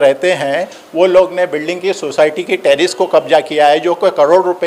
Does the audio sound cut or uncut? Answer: uncut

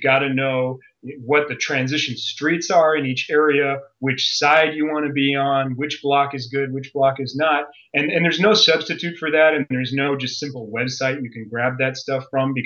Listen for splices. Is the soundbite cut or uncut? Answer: uncut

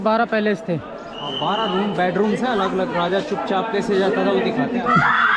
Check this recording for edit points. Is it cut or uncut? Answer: uncut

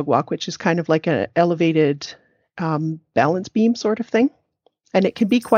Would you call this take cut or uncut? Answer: uncut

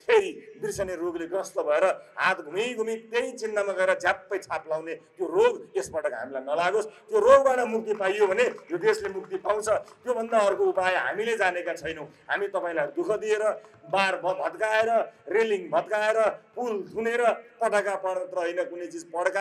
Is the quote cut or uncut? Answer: uncut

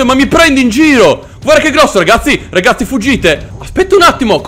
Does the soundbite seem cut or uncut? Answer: cut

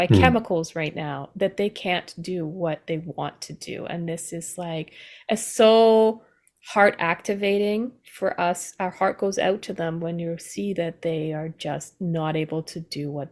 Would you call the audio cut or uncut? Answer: uncut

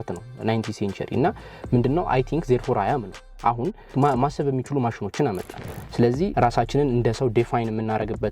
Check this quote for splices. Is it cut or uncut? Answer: cut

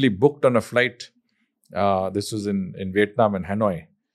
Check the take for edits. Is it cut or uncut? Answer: uncut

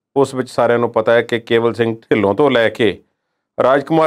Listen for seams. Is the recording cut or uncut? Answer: uncut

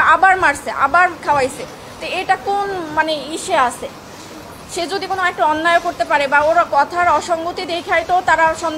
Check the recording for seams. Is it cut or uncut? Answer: uncut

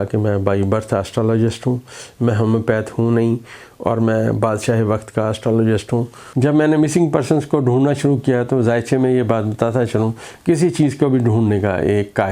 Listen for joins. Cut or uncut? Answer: cut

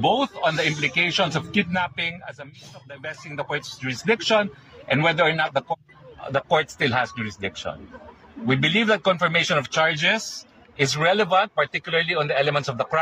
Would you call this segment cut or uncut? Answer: cut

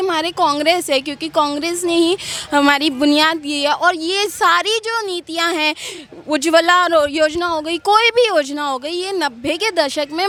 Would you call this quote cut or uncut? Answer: uncut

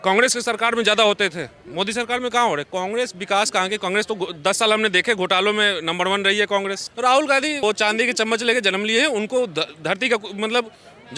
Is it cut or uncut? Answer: cut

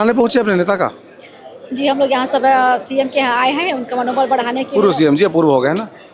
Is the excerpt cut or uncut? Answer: uncut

